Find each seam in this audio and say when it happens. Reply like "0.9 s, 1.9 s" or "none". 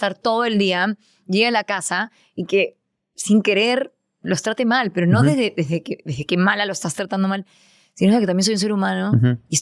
none